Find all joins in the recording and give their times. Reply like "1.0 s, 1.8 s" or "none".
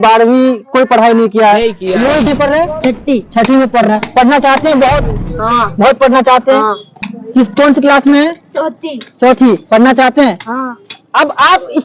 2.3 s, 7.0 s